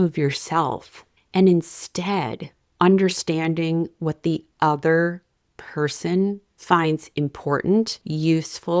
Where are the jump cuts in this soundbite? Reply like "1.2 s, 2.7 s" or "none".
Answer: none